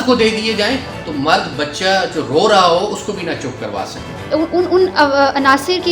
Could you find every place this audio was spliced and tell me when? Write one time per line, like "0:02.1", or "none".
0:04.3